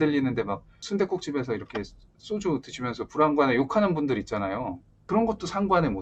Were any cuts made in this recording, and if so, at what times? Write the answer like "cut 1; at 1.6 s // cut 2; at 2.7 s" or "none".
none